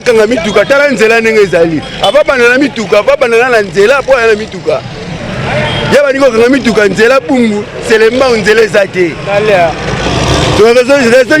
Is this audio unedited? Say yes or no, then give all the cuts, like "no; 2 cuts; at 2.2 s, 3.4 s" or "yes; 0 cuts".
yes; 0 cuts